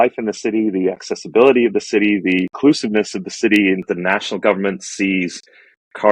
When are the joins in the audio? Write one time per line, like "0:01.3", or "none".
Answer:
0:02.5
0:03.8